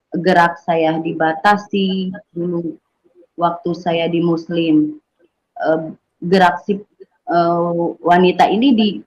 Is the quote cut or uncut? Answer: uncut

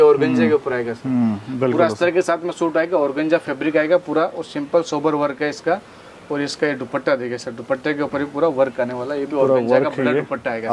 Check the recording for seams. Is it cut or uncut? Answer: uncut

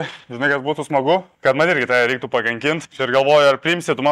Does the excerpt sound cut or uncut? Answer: cut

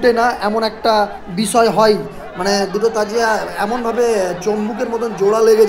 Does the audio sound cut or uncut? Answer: uncut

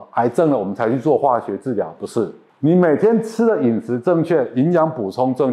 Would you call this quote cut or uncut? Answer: uncut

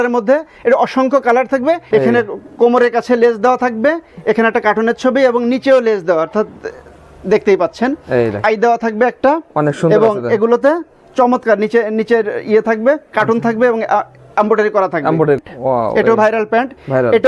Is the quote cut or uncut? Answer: cut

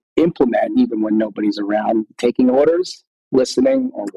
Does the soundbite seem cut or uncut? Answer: uncut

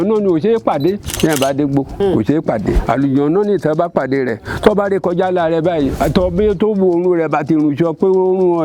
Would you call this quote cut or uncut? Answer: cut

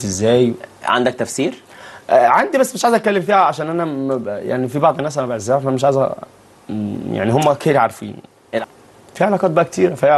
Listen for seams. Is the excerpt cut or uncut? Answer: cut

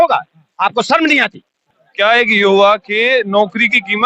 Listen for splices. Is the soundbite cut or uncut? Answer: cut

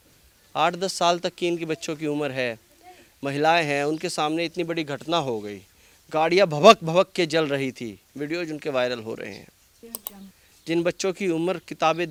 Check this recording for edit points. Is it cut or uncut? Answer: uncut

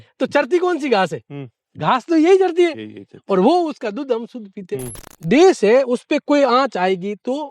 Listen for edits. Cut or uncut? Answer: cut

